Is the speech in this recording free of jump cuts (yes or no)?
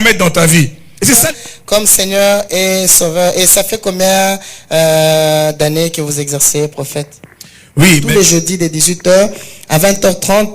no